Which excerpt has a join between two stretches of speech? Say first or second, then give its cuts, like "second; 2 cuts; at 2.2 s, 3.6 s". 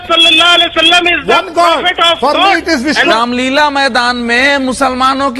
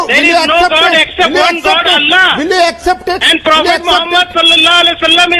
first; 1 cut; at 3.1 s